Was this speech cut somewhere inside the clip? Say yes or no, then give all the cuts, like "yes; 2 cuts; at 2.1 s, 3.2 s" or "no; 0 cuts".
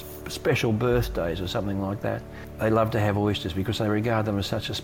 yes; 1 cut; at 2.4 s